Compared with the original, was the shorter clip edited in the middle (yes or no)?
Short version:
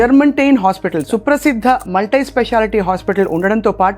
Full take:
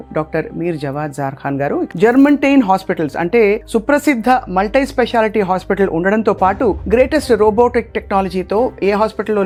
yes